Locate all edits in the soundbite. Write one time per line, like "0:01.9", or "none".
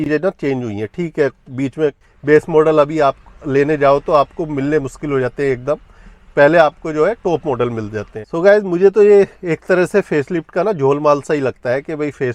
0:02.1
0:08.2